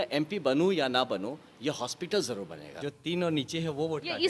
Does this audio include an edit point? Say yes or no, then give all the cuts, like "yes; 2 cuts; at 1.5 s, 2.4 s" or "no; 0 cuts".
yes; 1 cut; at 2.6 s